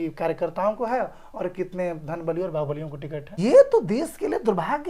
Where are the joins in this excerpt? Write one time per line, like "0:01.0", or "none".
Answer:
0:03.4